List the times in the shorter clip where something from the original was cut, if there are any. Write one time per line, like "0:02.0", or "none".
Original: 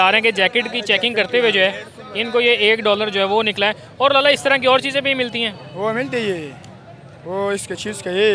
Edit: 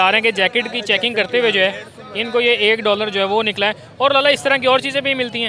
none